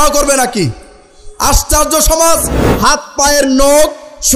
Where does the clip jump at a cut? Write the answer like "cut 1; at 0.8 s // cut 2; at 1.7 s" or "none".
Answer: cut 1; at 2.6 s

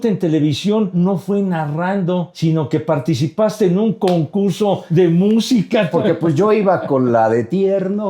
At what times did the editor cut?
cut 1; at 0.9 s // cut 2; at 2.3 s // cut 3; at 4.8 s // cut 4; at 5.9 s

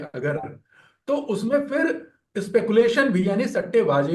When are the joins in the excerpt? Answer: none

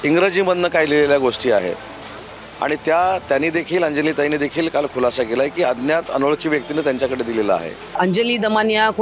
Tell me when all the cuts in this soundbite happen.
cut 1; at 8.0 s

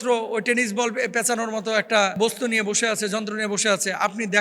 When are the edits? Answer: cut 1; at 2.2 s

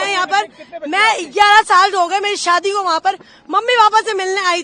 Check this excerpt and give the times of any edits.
none

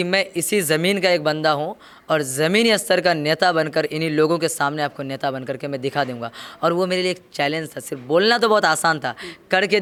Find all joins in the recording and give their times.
none

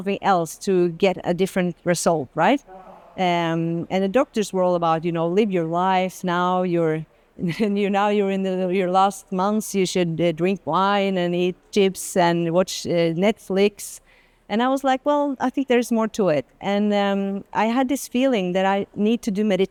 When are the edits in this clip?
none

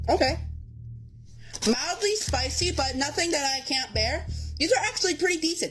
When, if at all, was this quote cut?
none

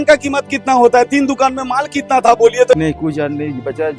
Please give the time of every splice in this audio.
cut 1; at 2.7 s

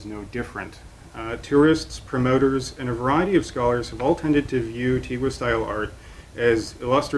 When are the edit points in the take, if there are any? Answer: cut 1; at 3.6 s

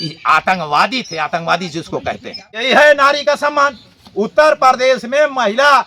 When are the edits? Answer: cut 1; at 2.6 s

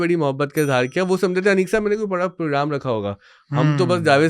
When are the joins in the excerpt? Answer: none

